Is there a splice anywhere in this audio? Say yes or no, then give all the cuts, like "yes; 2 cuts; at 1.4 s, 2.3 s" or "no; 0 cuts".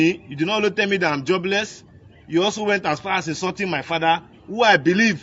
no; 0 cuts